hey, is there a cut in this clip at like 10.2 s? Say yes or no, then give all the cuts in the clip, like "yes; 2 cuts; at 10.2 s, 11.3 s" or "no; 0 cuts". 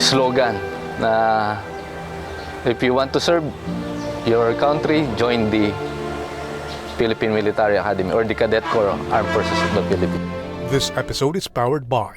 yes; 1 cut; at 10.2 s